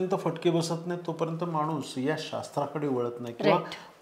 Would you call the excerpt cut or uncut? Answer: uncut